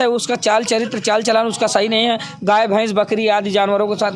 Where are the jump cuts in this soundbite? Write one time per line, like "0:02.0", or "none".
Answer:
none